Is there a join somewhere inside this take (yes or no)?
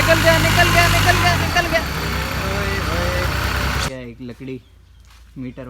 yes